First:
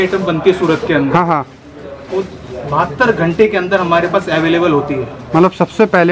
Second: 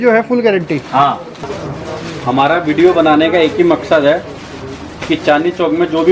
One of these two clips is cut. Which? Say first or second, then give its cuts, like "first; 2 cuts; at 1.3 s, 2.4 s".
second; 1 cut; at 1.4 s